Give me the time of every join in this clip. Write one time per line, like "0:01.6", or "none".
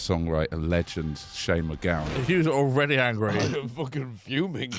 0:02.1

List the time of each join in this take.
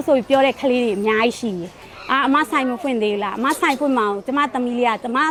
none

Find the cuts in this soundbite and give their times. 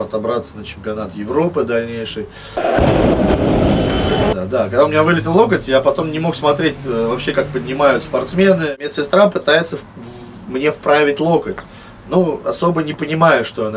0:02.6
0:04.3
0:08.8

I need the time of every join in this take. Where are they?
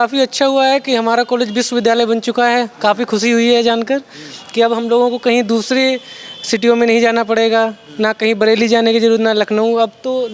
none

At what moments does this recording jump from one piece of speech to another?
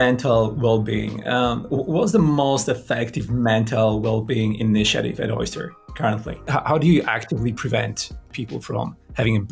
0:06.3
0:08.3

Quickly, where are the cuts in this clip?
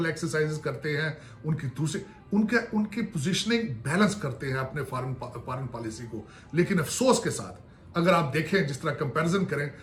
none

